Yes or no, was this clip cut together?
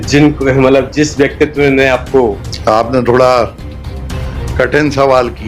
yes